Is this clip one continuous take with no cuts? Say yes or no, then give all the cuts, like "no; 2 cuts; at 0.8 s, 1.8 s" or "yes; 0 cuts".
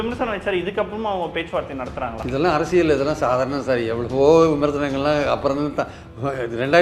yes; 0 cuts